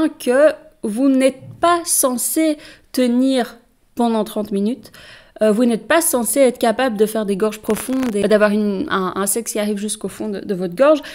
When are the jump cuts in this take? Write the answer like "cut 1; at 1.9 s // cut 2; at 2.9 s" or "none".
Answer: cut 1; at 8.2 s